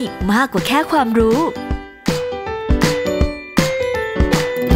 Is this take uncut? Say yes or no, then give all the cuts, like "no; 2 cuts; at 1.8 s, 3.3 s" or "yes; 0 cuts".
yes; 0 cuts